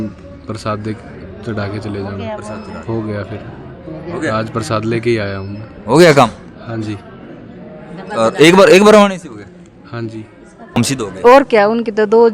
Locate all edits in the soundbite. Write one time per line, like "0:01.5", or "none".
0:10.8